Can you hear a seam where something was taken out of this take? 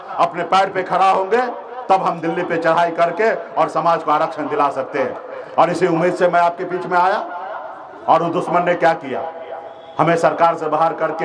no; 0 cuts

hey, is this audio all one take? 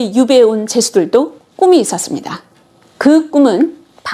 yes; 0 cuts

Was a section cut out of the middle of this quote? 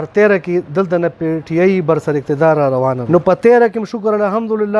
yes; 1 cut; at 3.0 s

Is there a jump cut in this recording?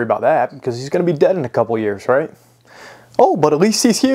no; 0 cuts

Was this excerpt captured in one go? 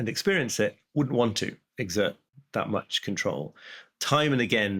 no; 1 cut; at 2.3 s

